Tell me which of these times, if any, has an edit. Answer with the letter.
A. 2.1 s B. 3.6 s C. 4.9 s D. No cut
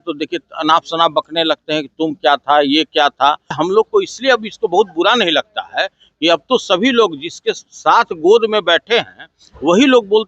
B